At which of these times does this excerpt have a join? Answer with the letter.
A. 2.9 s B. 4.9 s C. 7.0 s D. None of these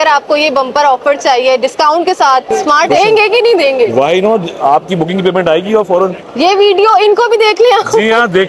A